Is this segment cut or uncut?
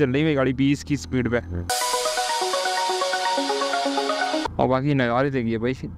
cut